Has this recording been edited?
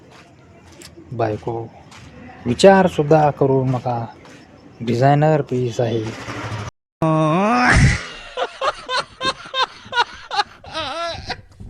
no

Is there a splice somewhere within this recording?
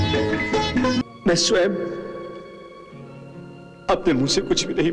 yes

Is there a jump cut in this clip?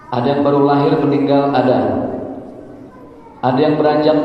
no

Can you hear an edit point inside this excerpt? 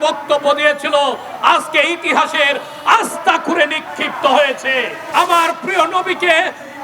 yes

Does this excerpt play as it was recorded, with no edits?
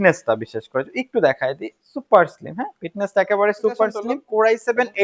no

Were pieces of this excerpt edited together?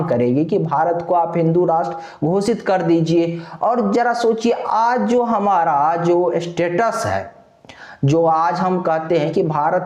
no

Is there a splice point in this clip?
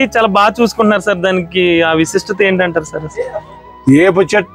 no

